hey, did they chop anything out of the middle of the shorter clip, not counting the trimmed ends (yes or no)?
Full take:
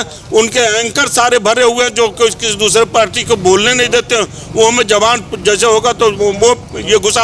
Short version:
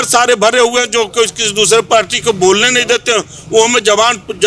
no